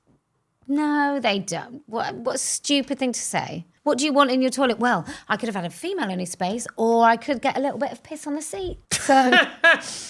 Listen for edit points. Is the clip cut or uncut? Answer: cut